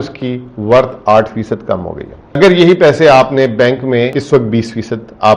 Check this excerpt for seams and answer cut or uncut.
cut